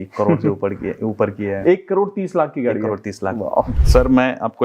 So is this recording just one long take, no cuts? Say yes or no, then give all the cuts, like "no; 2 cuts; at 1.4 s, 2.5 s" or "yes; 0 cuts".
no; 1 cut; at 3.7 s